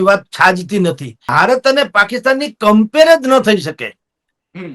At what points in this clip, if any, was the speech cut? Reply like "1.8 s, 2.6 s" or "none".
1.2 s